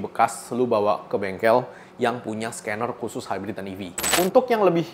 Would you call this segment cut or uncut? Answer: cut